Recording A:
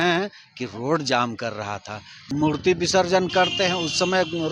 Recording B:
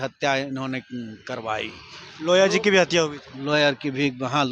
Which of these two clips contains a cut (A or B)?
A